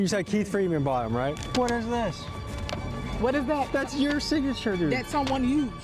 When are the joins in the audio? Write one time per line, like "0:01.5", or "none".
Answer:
0:01.4